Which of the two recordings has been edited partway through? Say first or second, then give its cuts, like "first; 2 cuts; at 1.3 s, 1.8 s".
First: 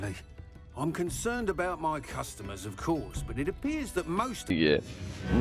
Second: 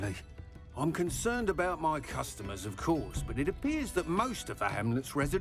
first; 1 cut; at 4.5 s